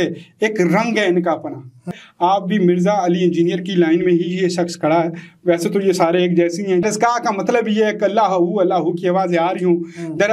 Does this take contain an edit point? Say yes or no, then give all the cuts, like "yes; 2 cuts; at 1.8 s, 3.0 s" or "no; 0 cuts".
yes; 2 cuts; at 1.9 s, 6.8 s